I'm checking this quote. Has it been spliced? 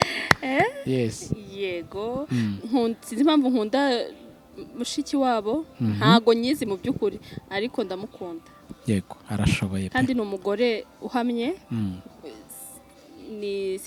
no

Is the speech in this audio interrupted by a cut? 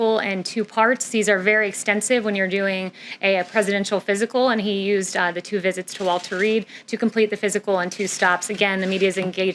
no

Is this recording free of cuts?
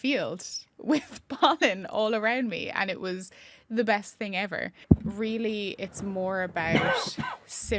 no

